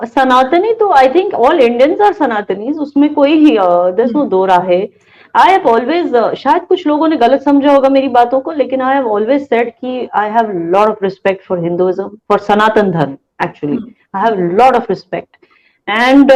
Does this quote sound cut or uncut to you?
uncut